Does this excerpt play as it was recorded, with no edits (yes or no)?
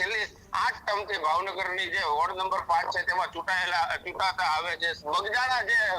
no